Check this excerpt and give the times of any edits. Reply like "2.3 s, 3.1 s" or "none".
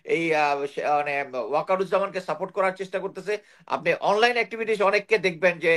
none